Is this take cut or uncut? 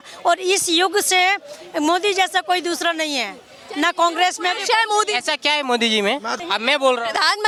uncut